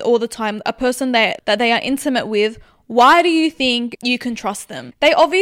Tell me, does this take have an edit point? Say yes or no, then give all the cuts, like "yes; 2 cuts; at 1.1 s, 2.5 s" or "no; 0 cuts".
yes; 1 cut; at 3.9 s